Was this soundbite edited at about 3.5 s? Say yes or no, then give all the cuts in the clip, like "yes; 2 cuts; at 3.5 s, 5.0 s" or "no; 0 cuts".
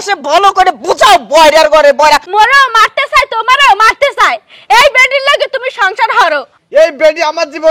no; 2 cuts; at 2.3 s, 6.5 s